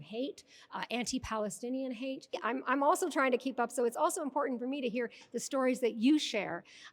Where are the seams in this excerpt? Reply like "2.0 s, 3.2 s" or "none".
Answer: 2.4 s

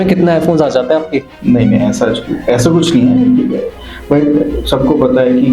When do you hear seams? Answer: 1.3 s

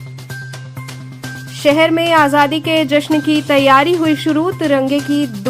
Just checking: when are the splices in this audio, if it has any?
1.0 s

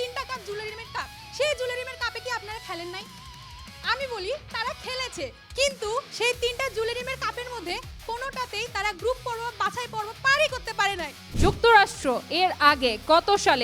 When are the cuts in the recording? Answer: 11.2 s

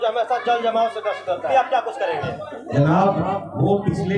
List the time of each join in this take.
1.5 s

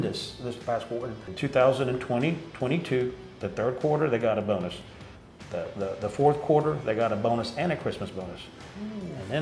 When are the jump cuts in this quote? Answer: 1.2 s

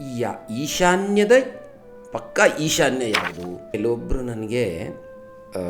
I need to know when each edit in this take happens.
3.7 s

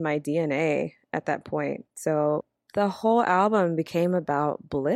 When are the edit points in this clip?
1.9 s, 2.4 s

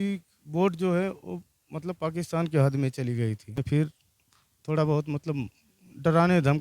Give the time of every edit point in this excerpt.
3.6 s

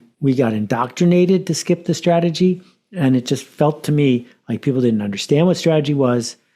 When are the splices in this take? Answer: none

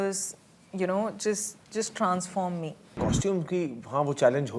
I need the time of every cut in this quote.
2.9 s

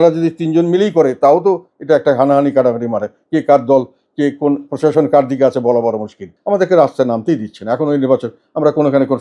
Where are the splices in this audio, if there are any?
6.3 s

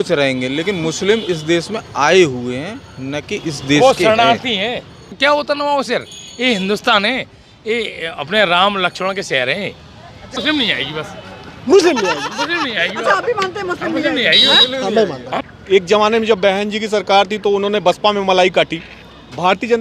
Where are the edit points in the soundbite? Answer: 5.0 s, 10.4 s, 15.3 s

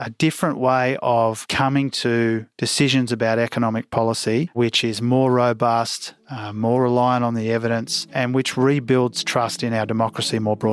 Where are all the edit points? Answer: 1.5 s, 4.5 s, 8.0 s

